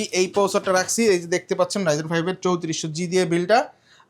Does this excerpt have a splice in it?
no; 0 cuts

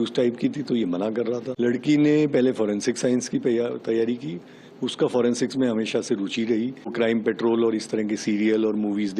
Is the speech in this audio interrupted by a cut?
yes; 2 cuts; at 1.5 s, 6.9 s

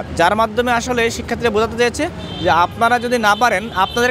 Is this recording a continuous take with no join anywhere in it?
yes; 0 cuts

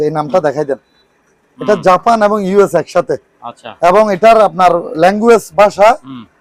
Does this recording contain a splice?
no; 0 cuts

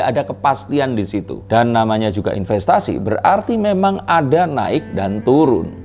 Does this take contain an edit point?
no; 0 cuts

